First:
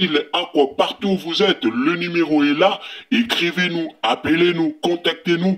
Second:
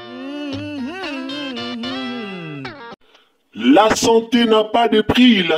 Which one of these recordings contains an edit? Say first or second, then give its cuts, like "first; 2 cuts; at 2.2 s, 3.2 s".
second; 1 cut; at 2.9 s